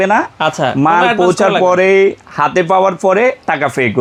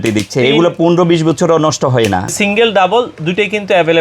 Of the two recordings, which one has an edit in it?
second; 1 cut; at 2.3 s

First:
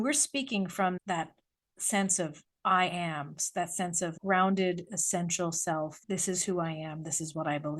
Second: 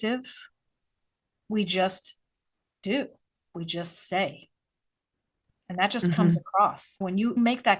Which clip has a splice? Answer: first; 2 cuts; at 1.0 s, 6.0 s

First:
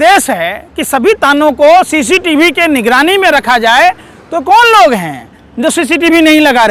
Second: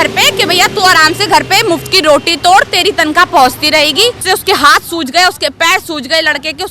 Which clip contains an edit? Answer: second; 1 cut; at 4.2 s

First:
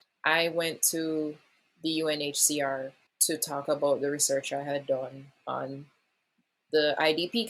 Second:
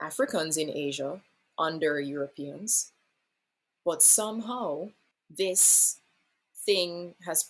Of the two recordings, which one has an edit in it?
second; 1 cut; at 5.0 s

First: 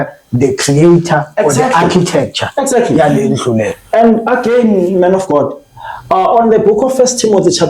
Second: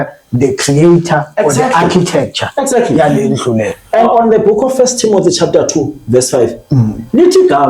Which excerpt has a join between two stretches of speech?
second; 1 cut; at 4.0 s

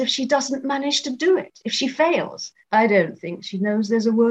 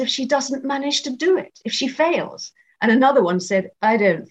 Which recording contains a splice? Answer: first; 1 cut; at 2.6 s

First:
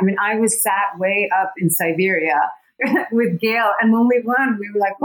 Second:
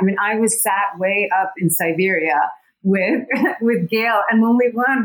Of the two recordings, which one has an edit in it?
first; 1 cut; at 2.8 s

